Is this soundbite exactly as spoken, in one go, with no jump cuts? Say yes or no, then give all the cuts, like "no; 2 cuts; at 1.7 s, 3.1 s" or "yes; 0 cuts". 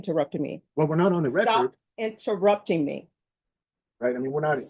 yes; 0 cuts